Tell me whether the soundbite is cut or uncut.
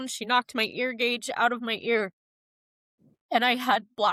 uncut